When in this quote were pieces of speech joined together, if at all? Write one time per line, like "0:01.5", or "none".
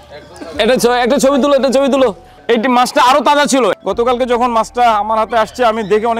0:02.3
0:03.7